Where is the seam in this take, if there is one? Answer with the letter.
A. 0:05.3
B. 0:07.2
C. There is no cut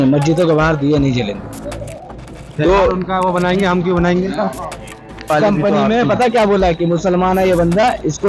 A